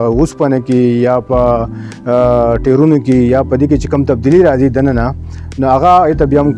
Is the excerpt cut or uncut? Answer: uncut